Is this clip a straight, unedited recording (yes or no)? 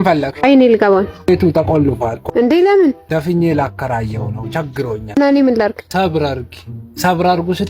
yes